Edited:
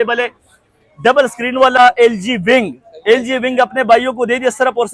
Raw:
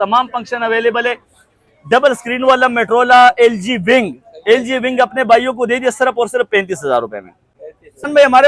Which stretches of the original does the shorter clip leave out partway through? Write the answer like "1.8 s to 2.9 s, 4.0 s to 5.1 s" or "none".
2.6 s to 3.2 s